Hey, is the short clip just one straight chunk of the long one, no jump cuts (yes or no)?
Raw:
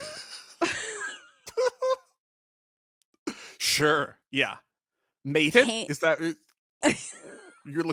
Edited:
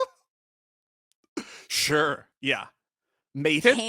yes